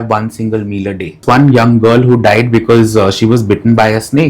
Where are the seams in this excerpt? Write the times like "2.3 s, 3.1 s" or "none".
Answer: 1.2 s